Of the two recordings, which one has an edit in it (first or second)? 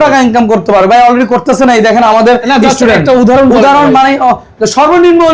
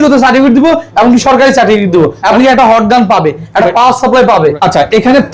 second